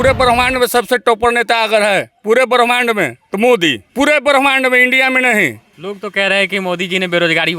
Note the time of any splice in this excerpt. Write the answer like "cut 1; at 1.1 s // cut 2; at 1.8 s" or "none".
cut 1; at 3.2 s // cut 2; at 3.8 s // cut 3; at 5.7 s